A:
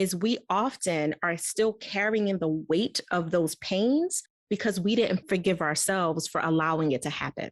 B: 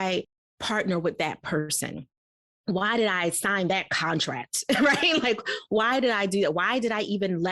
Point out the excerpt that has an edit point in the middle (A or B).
A